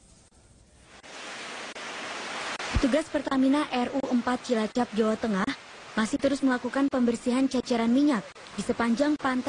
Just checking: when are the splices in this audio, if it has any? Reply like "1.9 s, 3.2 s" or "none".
2.1 s